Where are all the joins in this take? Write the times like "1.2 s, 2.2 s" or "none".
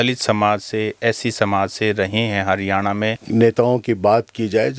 3.2 s